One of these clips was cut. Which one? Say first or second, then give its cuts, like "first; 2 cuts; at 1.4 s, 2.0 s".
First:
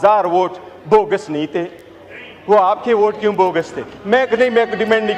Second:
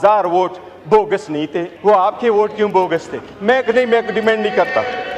second; 1 cut; at 1.7 s